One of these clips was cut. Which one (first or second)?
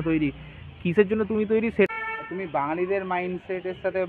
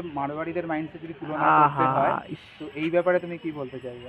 first